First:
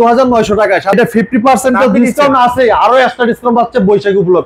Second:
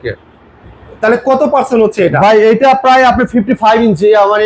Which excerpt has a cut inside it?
first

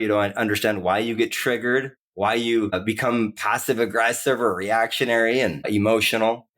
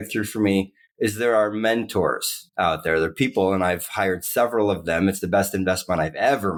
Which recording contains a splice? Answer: first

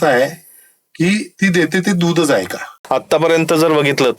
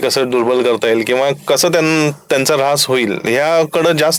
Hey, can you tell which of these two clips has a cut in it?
first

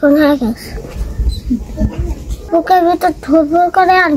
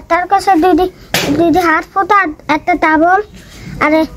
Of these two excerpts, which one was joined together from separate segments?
first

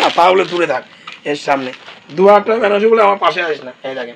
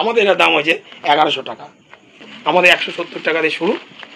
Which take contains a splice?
second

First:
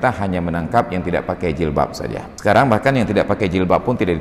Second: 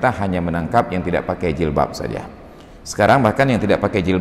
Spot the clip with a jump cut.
first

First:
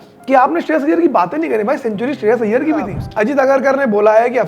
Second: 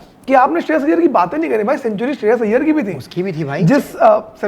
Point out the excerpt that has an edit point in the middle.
first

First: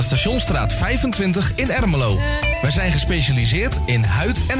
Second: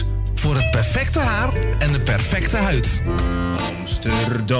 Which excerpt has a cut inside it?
second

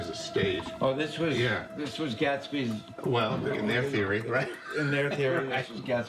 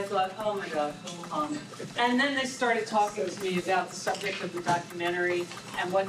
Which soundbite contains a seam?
second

